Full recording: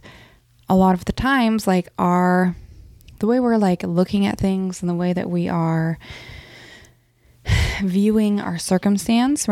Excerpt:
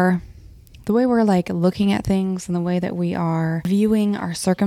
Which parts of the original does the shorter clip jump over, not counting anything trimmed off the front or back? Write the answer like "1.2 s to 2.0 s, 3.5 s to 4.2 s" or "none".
6.0 s to 7.9 s